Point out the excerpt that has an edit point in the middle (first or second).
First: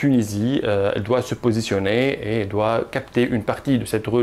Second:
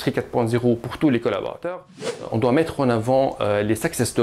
second